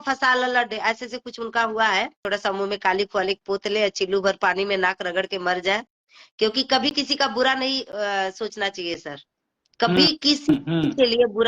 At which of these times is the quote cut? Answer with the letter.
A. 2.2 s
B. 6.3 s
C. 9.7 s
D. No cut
A